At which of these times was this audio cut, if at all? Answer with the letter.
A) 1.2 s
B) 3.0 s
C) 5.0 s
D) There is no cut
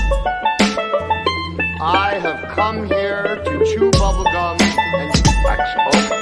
A